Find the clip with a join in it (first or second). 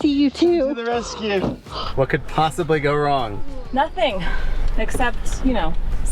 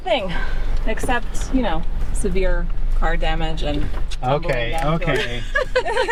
first